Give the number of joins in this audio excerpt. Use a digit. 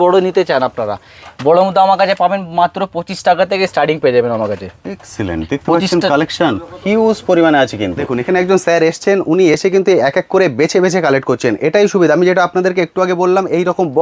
1